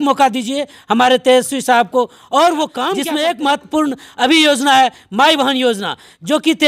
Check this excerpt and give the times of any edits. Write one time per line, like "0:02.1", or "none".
0:03.0